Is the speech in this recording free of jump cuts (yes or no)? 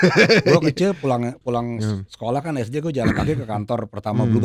yes